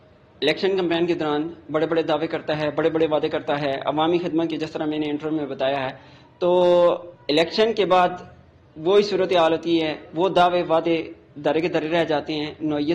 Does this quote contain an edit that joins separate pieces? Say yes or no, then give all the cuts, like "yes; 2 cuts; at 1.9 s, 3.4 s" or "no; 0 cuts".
no; 0 cuts